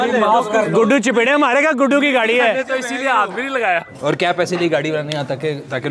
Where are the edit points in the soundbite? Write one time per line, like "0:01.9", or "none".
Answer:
0:03.9

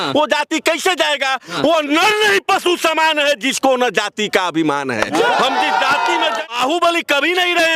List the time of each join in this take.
0:06.5

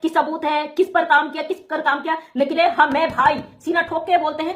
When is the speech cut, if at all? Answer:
0:02.6

